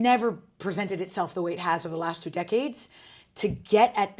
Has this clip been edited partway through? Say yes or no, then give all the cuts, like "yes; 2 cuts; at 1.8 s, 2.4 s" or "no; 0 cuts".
no; 0 cuts